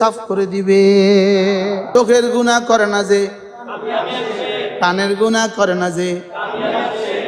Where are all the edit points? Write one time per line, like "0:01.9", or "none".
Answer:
0:01.9

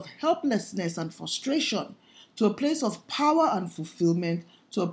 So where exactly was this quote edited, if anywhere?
none

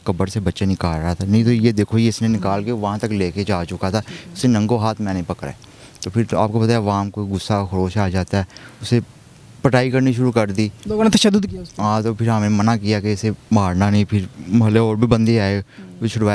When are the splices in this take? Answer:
none

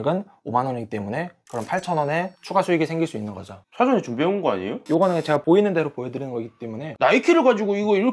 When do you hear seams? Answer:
0:06.9

